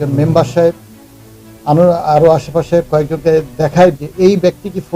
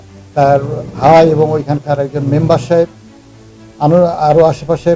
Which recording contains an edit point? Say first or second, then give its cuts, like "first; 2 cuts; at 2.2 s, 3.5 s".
first; 1 cut; at 4.0 s